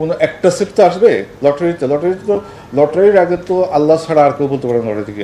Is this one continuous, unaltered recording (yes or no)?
yes